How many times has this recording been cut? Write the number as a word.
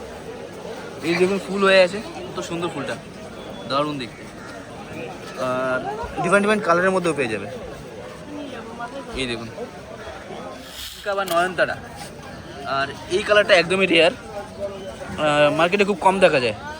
one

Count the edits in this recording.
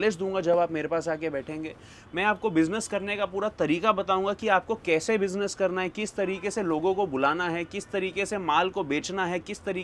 zero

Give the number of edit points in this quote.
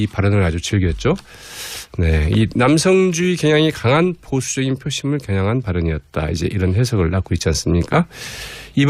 zero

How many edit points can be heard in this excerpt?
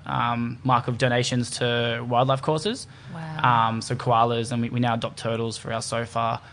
zero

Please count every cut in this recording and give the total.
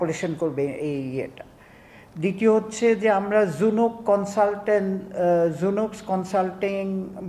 zero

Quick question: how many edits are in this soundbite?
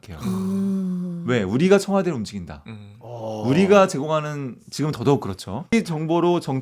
one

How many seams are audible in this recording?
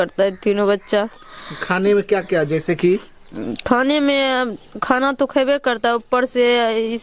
zero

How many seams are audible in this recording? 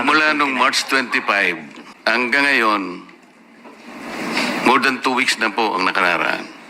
one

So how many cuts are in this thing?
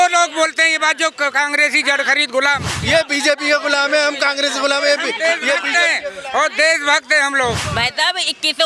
two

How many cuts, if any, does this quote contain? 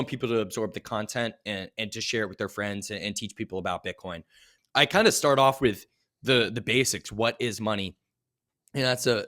one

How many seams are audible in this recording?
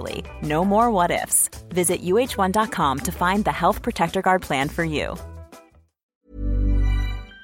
one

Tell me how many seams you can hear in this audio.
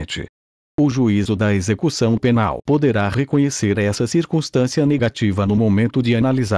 one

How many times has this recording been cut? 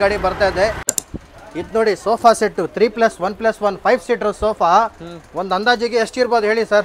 one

